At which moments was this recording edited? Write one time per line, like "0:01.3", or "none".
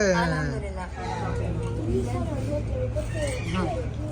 0:01.1